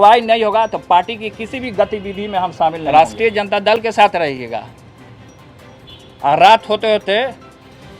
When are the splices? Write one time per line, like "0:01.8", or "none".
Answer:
0:02.8